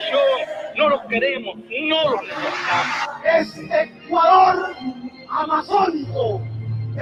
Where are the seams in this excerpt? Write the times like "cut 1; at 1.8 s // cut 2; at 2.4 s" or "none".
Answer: none